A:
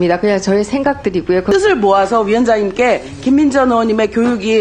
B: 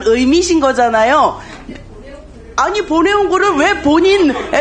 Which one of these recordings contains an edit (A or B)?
A